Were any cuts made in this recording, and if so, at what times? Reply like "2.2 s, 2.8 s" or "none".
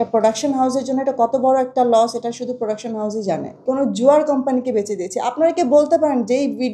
3.5 s